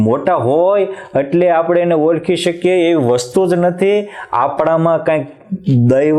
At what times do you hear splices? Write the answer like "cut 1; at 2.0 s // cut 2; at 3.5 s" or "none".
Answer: none

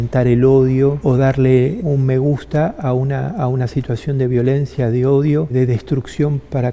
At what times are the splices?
cut 1; at 1.0 s // cut 2; at 1.8 s // cut 3; at 5.5 s

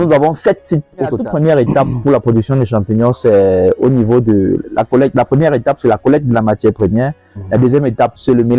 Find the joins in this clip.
cut 1; at 1.2 s

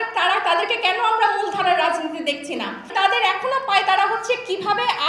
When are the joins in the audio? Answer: cut 1; at 2.9 s

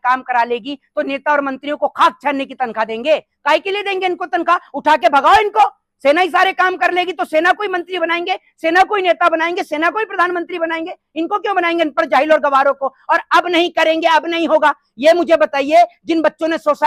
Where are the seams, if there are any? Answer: none

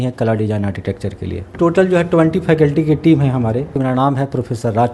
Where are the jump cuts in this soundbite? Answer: cut 1; at 1.5 s // cut 2; at 3.7 s

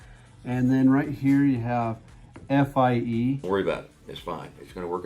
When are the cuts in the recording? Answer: cut 1; at 3.4 s

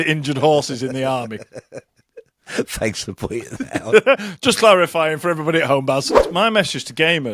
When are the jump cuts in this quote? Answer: cut 1; at 6.2 s

